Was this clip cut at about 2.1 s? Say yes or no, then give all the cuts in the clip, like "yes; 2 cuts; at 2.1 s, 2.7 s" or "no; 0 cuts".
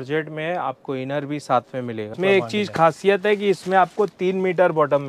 yes; 1 cut; at 2.1 s